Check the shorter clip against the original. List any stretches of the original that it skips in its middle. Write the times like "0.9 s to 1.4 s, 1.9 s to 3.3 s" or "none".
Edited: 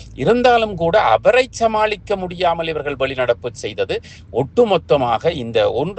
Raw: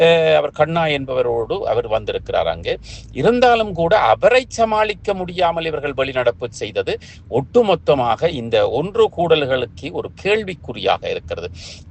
none